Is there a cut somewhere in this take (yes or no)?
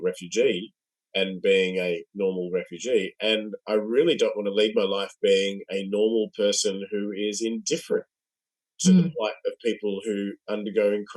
no